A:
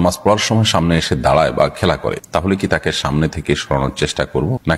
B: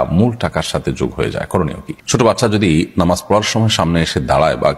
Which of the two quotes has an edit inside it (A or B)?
B